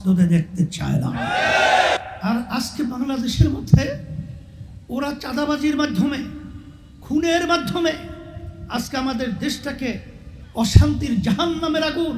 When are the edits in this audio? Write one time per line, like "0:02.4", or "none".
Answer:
0:02.0